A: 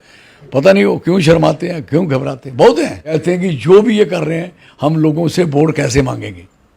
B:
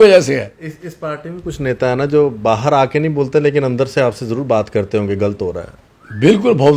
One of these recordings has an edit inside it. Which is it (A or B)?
A